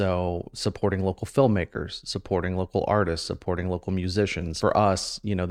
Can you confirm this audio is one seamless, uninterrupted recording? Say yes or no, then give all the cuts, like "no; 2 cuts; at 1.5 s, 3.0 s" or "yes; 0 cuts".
no; 1 cut; at 4.5 s